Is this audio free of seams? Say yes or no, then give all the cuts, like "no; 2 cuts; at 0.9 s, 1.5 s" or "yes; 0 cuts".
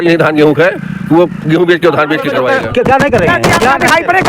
no; 1 cut; at 2.4 s